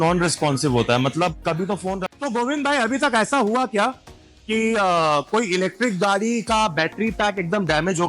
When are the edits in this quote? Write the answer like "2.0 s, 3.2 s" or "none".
2.0 s